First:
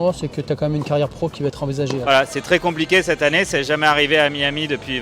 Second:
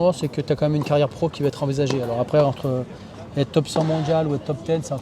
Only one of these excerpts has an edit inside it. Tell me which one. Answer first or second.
first